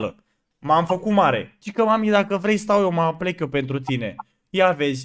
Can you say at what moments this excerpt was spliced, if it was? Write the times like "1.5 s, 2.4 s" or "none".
1.6 s